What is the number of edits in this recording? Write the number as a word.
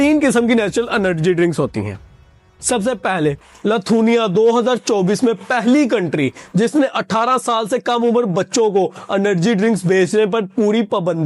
one